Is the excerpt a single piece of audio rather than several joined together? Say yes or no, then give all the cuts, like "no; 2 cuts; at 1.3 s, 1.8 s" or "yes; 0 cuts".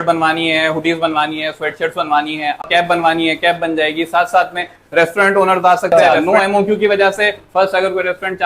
no; 2 cuts; at 2.6 s, 5.9 s